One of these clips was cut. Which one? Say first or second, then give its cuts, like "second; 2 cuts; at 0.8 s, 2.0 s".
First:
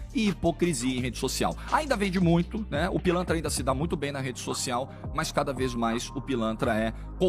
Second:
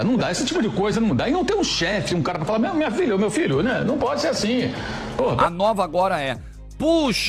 second; 1 cut; at 5.4 s